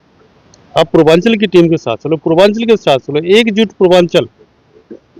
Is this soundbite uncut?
yes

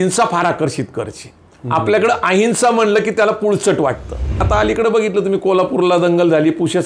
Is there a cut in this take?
yes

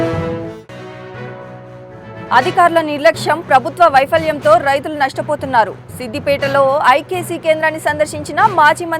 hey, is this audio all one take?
yes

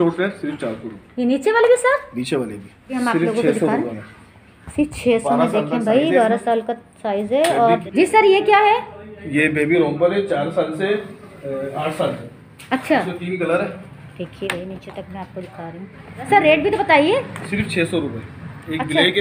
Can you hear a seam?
yes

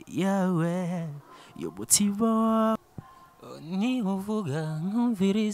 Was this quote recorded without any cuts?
no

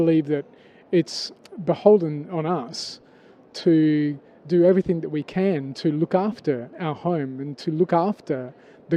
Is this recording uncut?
yes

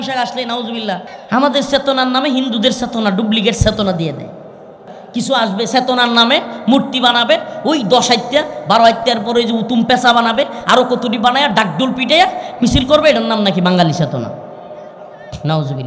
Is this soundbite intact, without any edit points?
no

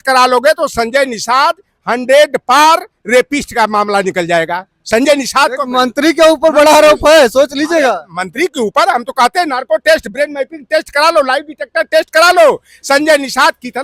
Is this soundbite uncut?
yes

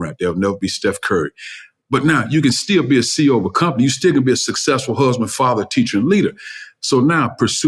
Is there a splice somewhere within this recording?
no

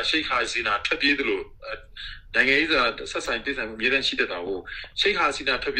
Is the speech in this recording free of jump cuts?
yes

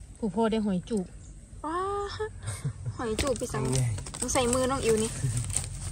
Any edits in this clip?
no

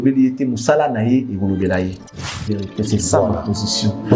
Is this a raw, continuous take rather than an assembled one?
no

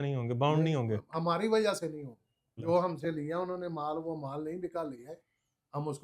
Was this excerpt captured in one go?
no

